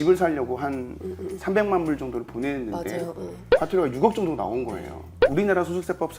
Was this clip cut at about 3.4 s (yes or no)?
yes